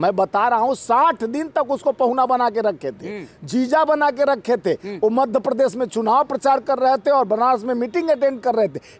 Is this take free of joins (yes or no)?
yes